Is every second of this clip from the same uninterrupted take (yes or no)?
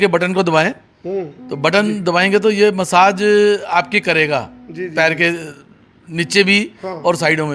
yes